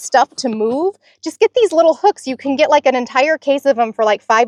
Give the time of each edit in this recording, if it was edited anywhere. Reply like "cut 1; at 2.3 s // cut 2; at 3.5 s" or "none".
none